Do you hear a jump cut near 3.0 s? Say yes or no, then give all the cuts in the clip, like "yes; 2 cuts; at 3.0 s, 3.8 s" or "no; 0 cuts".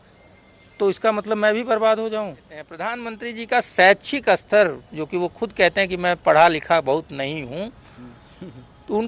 yes; 1 cut; at 3.0 s